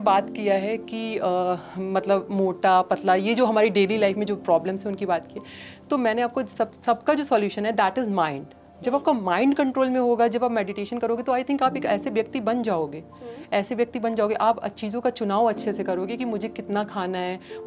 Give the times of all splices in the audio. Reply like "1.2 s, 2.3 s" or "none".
none